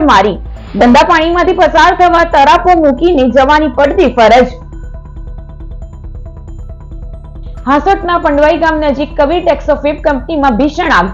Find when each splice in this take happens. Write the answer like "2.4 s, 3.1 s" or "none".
none